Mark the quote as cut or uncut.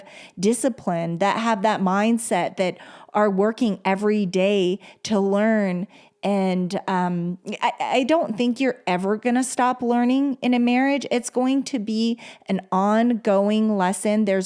uncut